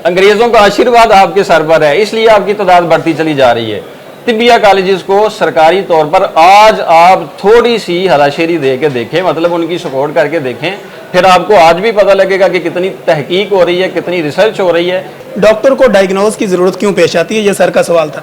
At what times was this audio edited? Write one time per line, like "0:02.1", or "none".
none